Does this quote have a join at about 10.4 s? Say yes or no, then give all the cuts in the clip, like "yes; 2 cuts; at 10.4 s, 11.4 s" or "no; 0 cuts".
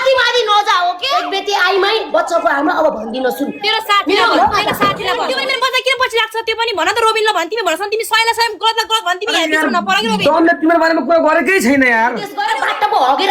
no; 3 cuts; at 1.1 s, 5.2 s, 12.3 s